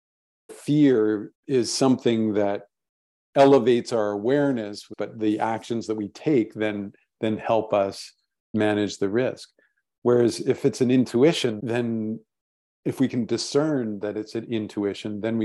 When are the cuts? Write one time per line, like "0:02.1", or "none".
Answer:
0:01.3
0:04.9
0:11.6